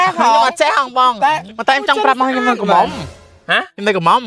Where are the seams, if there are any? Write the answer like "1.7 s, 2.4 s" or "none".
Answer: none